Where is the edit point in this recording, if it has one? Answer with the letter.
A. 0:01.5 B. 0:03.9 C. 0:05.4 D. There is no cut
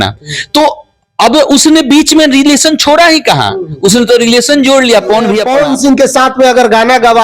C